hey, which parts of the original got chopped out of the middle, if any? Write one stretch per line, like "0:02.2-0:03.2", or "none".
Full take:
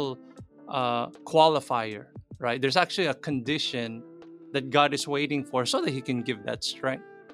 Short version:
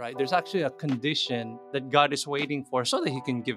0:04.0-0:04.4